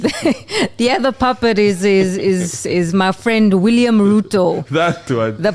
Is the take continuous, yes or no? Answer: yes